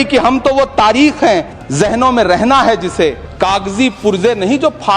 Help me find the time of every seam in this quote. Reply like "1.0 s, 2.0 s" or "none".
1.6 s, 3.2 s